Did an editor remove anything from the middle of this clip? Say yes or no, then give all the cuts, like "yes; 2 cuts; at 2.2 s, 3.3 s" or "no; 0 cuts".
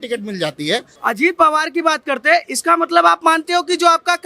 yes; 1 cut; at 0.9 s